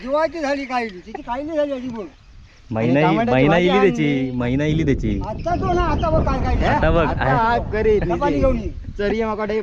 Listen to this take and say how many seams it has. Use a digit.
0